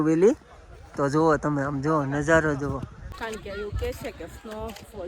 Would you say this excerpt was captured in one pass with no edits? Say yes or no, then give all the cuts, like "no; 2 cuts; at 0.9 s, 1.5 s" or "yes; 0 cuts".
no; 1 cut; at 3.0 s